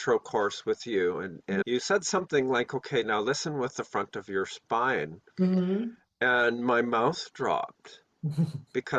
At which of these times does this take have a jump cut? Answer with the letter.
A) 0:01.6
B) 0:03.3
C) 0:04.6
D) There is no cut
A